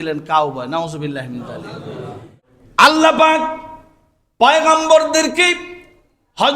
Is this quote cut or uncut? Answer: cut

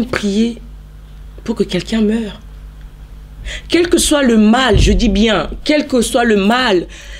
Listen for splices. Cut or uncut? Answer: uncut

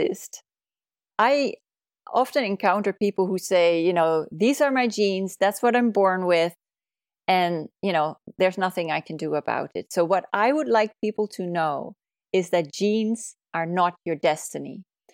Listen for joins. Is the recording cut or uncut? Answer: cut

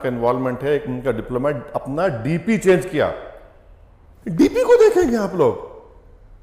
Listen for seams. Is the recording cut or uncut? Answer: uncut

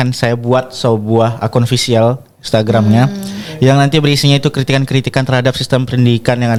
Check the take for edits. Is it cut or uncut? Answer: uncut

